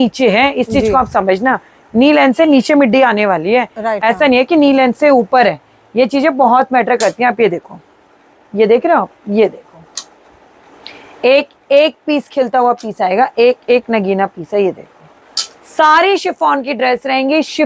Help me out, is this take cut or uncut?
uncut